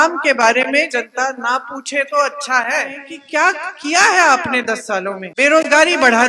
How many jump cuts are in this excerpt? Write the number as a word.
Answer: two